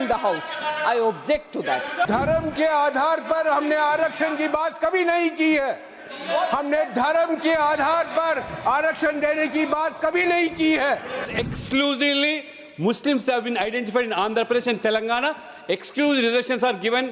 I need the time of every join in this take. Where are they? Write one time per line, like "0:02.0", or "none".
0:02.1
0:11.3